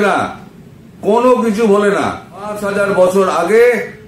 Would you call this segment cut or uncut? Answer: cut